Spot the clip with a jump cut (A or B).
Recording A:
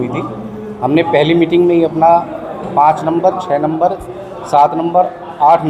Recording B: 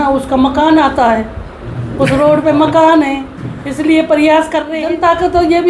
B